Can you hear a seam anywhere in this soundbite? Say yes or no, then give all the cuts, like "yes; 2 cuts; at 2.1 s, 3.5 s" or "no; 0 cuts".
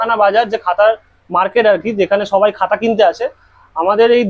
no; 0 cuts